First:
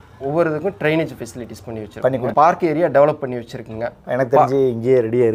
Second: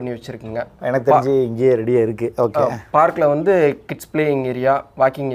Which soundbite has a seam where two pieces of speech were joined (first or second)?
first